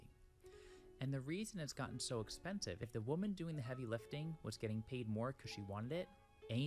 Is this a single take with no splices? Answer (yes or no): no